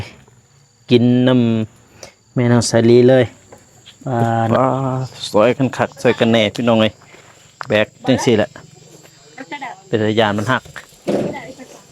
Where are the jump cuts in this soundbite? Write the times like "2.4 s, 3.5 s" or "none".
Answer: 4.5 s